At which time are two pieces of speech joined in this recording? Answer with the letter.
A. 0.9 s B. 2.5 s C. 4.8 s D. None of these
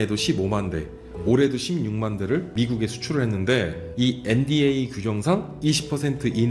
B